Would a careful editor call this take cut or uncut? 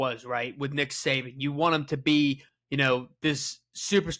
cut